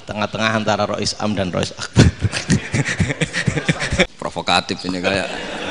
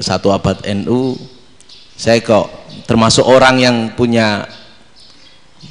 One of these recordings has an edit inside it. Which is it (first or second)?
first